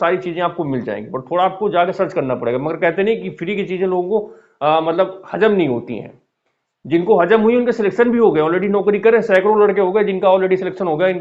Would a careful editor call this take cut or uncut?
uncut